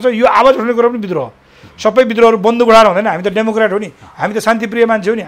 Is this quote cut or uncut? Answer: uncut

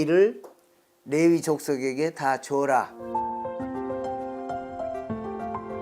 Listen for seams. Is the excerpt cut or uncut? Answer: cut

